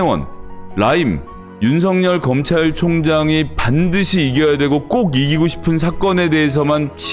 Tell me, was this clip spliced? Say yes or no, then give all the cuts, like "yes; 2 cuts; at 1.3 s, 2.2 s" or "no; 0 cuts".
no; 0 cuts